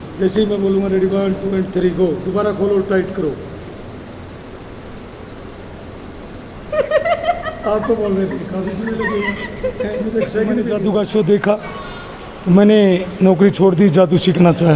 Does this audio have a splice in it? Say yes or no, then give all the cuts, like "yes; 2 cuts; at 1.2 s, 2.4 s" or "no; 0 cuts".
yes; 1 cut; at 10.7 s